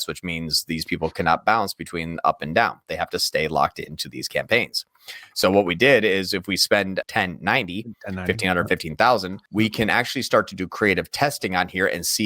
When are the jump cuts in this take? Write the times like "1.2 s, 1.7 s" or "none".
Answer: 7.1 s, 9.4 s

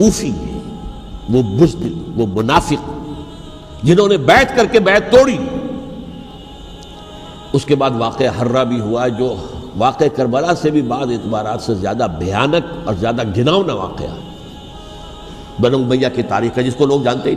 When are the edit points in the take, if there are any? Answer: 6.4 s

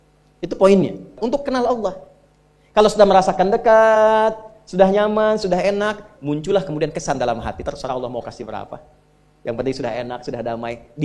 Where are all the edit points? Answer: 1.2 s

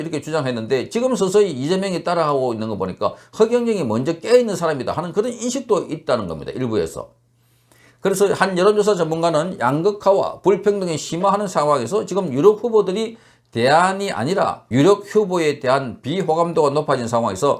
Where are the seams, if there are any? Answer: 14.6 s

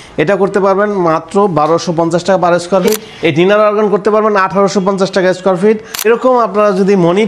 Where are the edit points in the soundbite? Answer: 3.1 s, 5.9 s

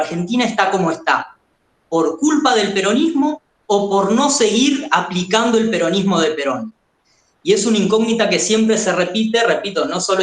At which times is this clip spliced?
none

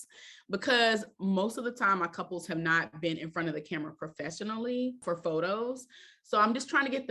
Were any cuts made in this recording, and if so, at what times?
5.0 s

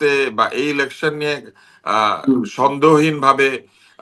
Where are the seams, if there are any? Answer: none

